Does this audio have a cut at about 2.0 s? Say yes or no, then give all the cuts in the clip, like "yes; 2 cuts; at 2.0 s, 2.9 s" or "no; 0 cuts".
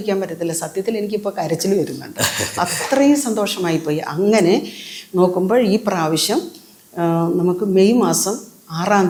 no; 0 cuts